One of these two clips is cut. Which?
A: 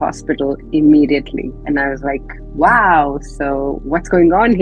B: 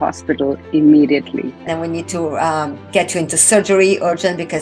B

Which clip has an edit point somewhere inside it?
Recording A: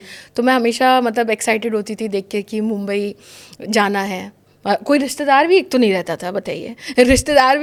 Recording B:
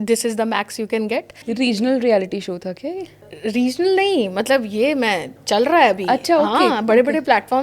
B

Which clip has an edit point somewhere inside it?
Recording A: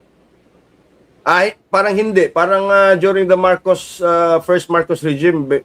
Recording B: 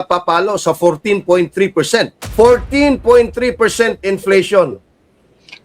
B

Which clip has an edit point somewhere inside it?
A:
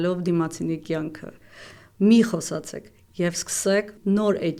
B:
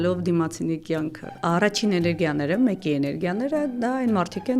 B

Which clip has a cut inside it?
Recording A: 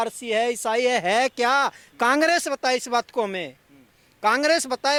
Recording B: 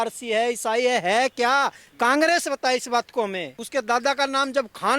B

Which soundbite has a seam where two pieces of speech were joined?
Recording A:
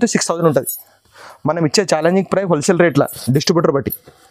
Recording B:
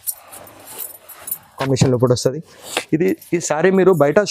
B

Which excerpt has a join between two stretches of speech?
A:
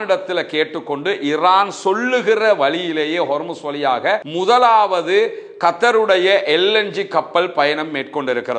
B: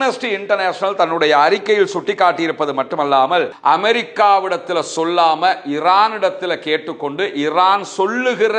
B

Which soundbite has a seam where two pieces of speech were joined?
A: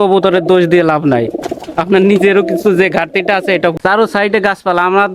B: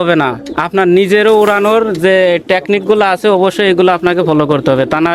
A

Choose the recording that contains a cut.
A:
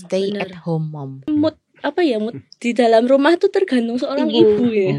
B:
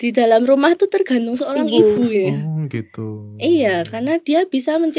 A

